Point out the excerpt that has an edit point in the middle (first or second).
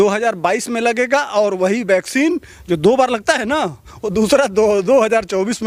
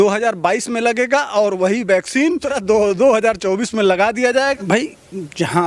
second